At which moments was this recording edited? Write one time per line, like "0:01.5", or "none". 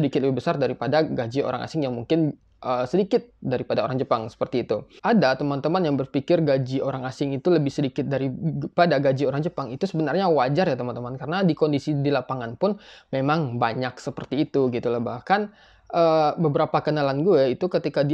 0:04.9